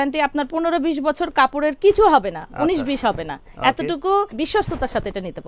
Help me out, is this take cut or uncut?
uncut